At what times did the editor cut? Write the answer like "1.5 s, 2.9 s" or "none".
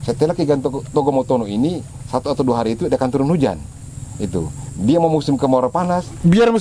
none